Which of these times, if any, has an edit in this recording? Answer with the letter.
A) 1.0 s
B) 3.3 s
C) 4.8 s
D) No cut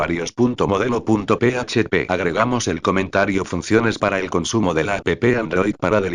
A